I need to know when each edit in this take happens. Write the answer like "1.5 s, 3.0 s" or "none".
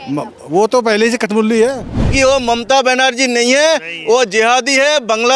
2.1 s

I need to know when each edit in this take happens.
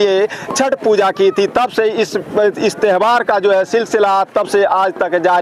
none

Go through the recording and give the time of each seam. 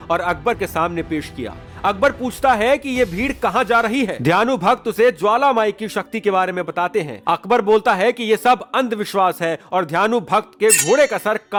none

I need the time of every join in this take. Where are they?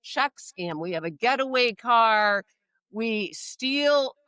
none

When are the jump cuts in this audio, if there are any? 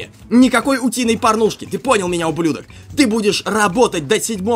none

